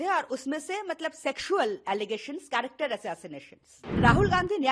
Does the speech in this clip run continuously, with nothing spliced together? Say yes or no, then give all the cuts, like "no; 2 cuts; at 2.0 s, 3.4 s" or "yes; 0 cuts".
no; 1 cut; at 3.8 s